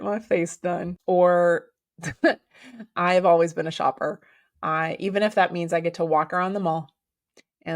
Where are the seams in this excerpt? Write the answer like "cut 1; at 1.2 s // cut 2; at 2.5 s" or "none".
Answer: cut 1; at 0.9 s